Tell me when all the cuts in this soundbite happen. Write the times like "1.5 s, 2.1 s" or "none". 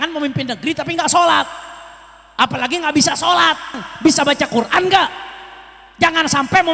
3.9 s

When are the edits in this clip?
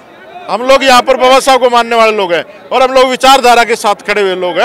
none

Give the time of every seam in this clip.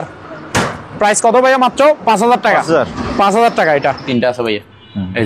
4.1 s

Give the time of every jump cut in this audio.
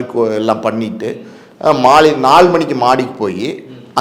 none

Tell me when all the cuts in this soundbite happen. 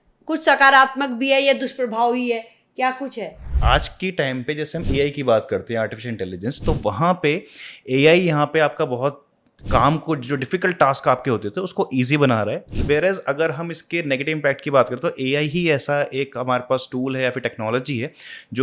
3.5 s

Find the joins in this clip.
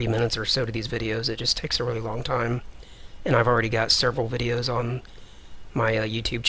4.4 s

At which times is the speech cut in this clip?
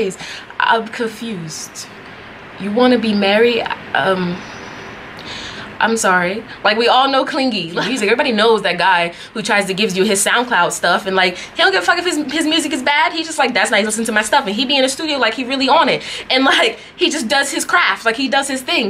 7.8 s

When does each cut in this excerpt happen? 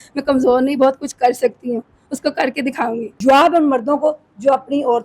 3.0 s

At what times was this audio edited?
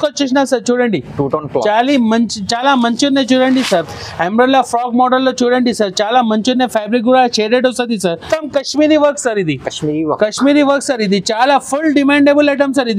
8.3 s

